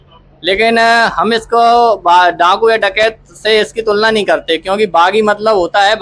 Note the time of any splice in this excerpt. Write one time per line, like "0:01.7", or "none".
none